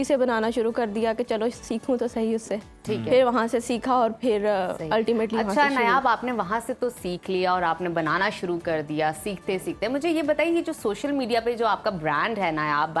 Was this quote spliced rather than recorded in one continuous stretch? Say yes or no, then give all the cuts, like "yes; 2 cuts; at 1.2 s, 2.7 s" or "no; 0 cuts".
no; 0 cuts